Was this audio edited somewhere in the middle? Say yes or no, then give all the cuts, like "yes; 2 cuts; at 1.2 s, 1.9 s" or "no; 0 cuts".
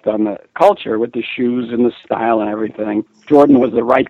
no; 0 cuts